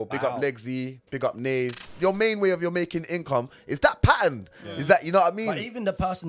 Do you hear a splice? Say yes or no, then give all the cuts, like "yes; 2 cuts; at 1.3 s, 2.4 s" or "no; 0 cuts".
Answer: yes; 1 cut; at 1.9 s